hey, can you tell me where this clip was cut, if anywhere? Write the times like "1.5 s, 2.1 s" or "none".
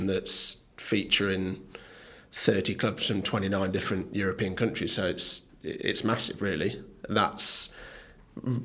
none